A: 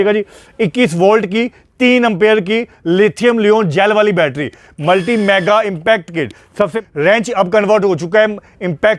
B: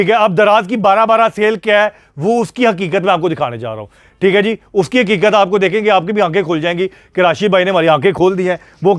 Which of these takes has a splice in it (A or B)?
A